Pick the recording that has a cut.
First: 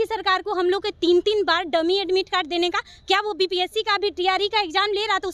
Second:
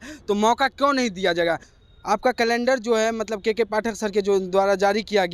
second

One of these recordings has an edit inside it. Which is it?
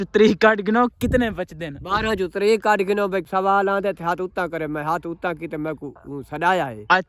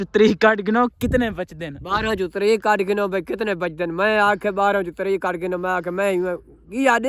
first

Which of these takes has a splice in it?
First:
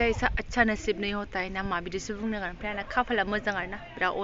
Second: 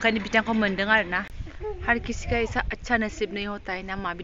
second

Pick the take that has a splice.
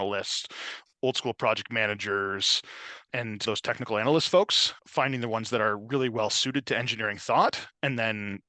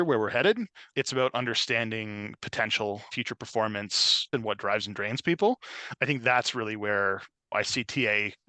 second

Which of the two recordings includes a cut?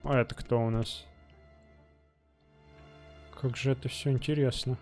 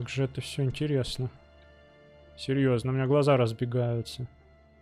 first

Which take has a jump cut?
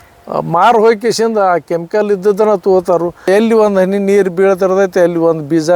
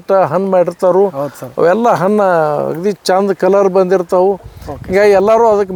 first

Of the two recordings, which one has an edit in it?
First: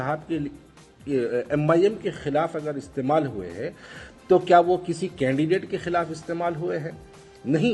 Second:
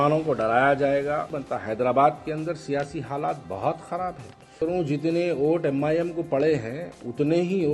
second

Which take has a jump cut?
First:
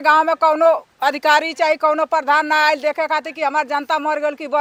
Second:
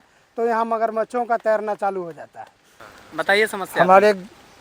second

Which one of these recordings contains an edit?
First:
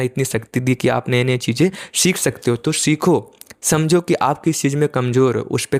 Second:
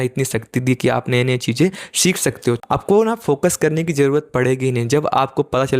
second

